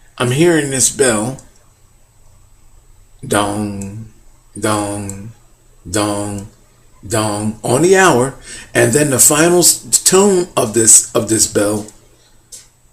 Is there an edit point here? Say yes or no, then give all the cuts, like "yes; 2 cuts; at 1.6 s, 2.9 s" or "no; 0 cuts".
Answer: yes; 1 cut; at 4.7 s